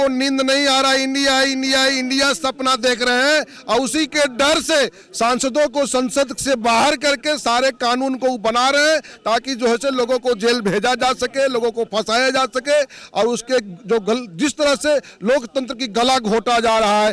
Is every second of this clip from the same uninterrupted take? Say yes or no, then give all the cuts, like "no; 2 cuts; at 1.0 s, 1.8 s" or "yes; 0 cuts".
yes; 0 cuts